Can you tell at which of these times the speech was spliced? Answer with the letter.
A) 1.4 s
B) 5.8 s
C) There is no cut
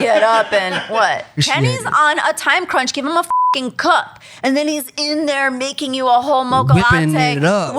A